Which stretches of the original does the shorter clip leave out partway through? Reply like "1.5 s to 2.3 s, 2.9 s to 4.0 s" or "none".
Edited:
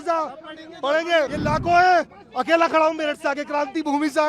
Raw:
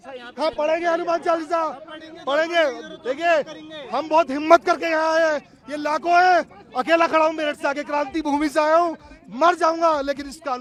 2.8 s to 5.7 s